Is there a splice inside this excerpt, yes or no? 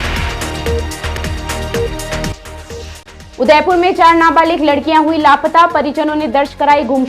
yes